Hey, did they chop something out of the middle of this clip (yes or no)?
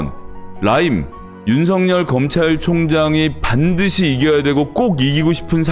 no